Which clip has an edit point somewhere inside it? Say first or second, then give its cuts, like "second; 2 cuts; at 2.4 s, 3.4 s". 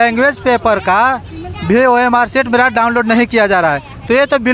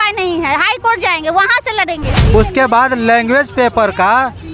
second; 1 cut; at 2.1 s